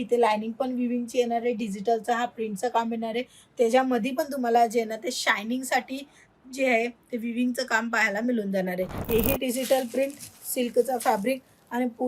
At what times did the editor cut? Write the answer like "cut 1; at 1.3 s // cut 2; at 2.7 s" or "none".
cut 1; at 9.0 s